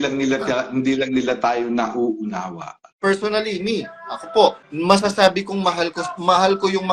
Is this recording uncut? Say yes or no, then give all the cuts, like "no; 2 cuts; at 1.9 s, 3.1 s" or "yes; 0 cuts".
no; 2 cuts; at 2.8 s, 4.6 s